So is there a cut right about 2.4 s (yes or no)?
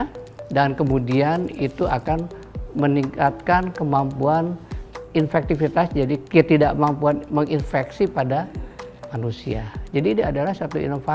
no